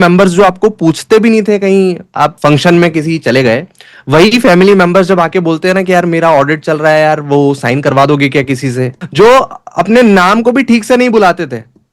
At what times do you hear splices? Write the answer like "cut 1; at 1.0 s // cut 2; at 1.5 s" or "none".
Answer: cut 1; at 2.3 s // cut 2; at 9.0 s